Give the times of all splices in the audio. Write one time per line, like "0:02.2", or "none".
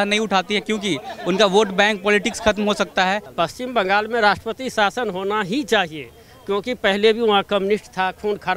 0:03.3